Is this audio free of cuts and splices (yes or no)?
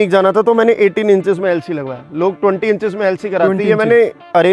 yes